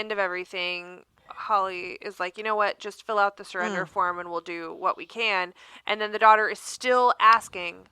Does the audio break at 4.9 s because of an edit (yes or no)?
no